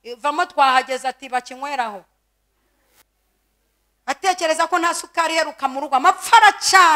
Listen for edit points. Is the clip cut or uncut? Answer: uncut